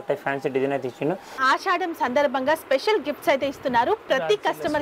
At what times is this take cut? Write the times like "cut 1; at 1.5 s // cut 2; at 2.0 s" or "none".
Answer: cut 1; at 1.4 s